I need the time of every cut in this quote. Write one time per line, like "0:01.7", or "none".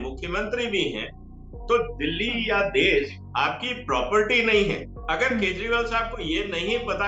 0:04.9